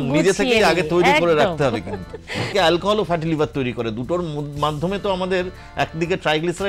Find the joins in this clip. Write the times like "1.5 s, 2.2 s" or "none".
2.5 s

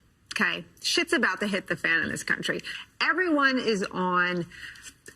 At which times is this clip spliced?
2.7 s

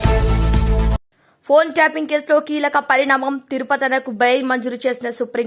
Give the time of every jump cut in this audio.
0.9 s

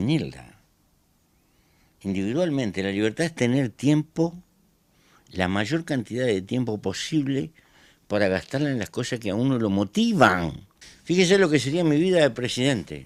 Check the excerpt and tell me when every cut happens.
none

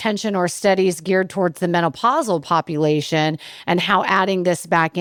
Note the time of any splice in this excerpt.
none

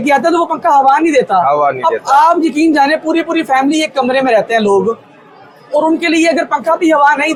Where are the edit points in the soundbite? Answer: none

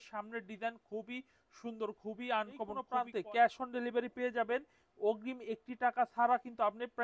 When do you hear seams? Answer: 2.8 s

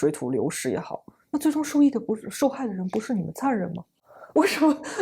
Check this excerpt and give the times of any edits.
none

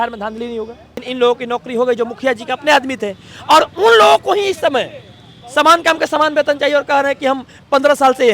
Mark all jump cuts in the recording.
1.0 s

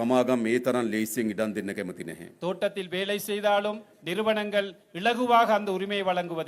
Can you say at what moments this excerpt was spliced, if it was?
none

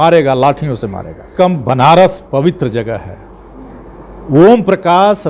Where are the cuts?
1.3 s

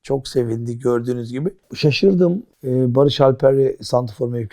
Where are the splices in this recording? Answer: 1.7 s, 2.5 s

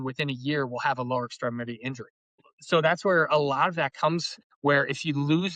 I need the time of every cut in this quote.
2.5 s

